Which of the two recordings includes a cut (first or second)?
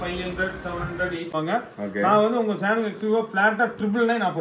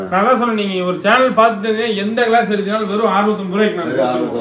first